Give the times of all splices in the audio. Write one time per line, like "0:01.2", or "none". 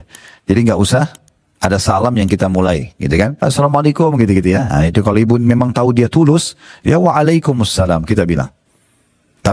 0:03.4